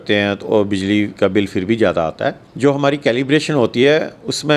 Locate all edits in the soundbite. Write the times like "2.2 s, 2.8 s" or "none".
2.5 s